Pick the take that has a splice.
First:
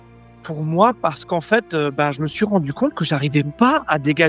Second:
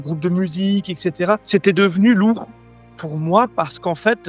second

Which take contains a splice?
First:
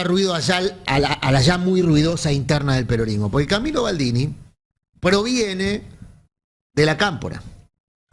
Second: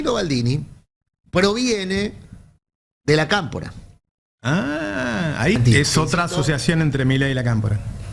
second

